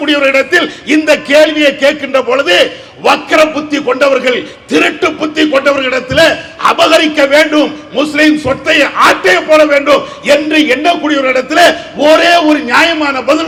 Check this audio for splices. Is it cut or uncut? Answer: uncut